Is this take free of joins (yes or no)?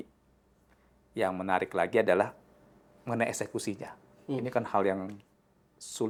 yes